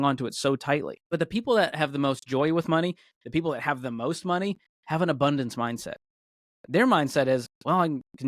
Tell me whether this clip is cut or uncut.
cut